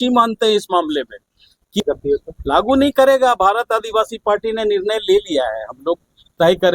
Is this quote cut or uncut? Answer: cut